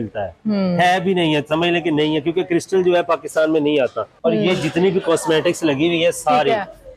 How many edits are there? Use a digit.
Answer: 1